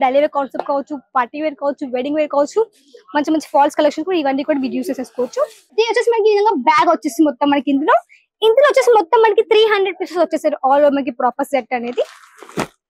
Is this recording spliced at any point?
yes; 1 cut; at 5.6 s

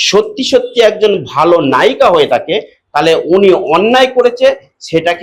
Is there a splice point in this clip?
no; 0 cuts

